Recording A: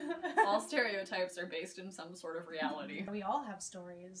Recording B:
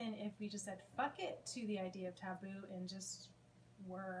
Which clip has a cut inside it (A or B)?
A